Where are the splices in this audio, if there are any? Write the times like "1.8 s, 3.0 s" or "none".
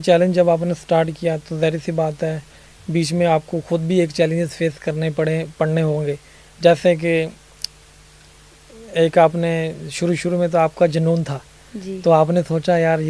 none

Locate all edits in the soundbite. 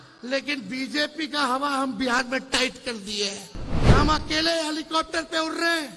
3.7 s

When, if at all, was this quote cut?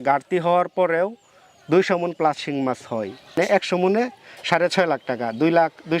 3.4 s

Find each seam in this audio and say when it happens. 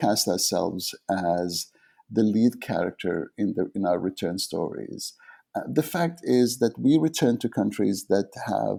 none

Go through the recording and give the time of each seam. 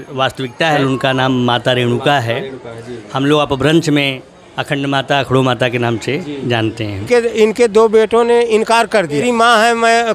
0.8 s, 7.0 s, 9.2 s

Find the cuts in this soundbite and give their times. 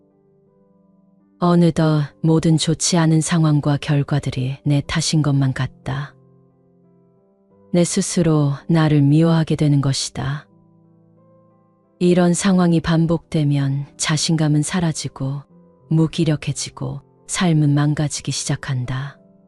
6.1 s, 7.7 s, 10.4 s, 12.0 s

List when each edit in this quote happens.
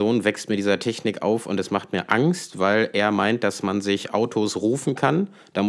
none

